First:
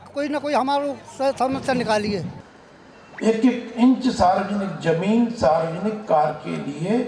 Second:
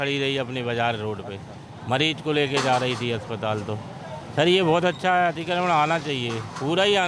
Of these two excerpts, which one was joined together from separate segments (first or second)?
first